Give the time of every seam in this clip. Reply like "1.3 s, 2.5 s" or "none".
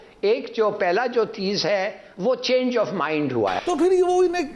none